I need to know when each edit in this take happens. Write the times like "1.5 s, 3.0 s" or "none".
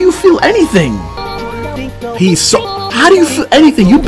1.2 s